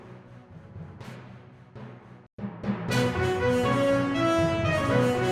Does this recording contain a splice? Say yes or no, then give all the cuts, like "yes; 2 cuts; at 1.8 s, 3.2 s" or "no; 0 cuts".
no; 0 cuts